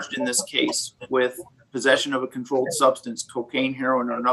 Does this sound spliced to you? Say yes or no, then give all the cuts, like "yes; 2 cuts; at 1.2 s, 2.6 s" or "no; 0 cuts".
no; 0 cuts